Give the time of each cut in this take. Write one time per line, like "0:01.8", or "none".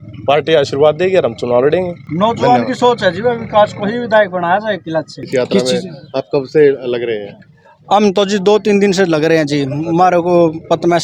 none